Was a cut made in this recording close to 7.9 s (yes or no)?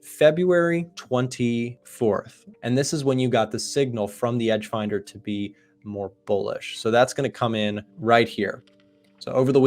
yes